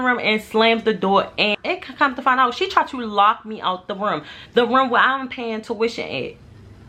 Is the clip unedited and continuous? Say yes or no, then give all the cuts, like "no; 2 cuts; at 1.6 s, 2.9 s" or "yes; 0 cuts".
yes; 0 cuts